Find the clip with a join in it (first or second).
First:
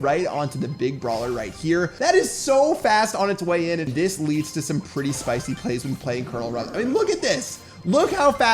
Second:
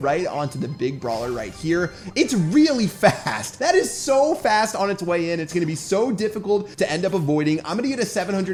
first